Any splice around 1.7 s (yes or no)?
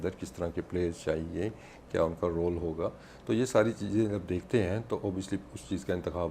no